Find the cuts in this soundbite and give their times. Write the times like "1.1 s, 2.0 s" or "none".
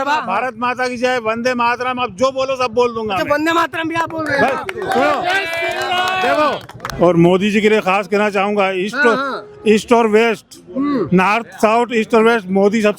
6.8 s